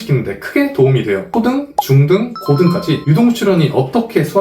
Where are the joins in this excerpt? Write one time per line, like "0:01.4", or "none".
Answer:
0:01.4